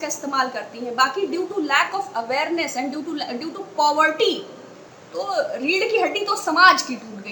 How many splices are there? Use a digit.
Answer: 1